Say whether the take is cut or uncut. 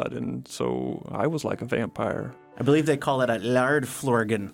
cut